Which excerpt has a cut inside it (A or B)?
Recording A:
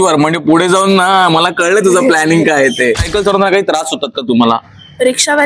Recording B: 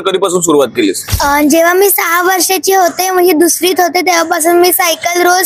A